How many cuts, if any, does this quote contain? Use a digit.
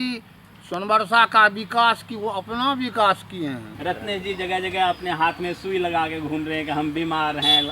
1